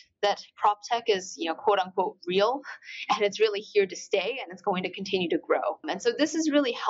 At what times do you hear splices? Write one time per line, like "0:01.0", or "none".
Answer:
0:05.8

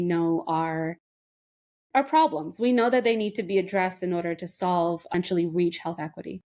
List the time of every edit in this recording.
0:05.1

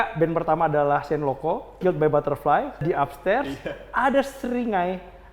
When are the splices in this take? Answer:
0:01.8
0:02.8

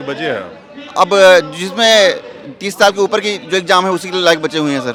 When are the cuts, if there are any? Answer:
none

